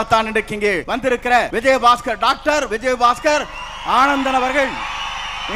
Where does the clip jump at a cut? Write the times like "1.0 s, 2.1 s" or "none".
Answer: 1.2 s